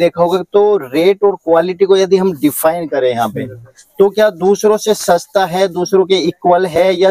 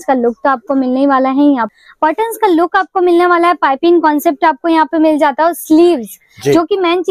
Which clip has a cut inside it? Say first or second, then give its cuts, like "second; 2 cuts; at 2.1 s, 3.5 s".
second; 1 cut; at 1.8 s